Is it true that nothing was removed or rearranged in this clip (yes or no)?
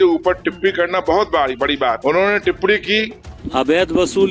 no